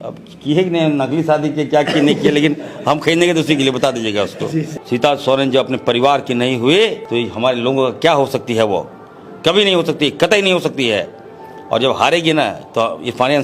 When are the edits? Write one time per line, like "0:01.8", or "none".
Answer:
0:04.8
0:07.0